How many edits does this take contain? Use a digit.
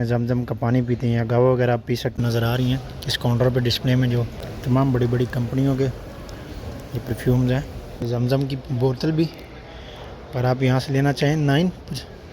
3